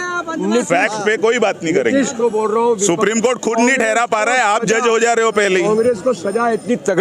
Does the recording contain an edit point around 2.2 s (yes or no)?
yes